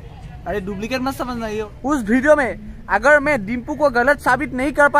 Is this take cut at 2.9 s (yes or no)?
no